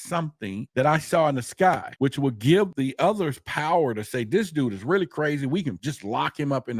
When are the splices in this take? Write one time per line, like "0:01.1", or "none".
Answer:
none